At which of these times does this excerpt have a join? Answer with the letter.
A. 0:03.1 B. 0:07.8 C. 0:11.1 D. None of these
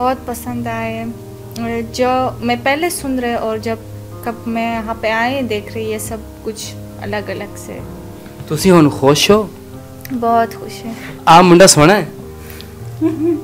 C